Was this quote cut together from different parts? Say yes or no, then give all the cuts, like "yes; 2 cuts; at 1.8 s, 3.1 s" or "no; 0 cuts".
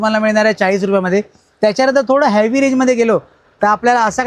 no; 0 cuts